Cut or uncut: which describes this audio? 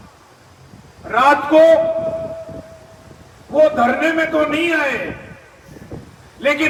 uncut